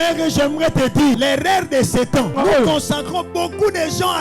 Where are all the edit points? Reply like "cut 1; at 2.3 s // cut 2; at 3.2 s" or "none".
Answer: cut 1; at 1.1 s // cut 2; at 2.4 s